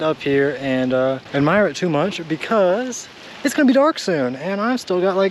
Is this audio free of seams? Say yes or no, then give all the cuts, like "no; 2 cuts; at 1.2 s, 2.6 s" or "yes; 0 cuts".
yes; 0 cuts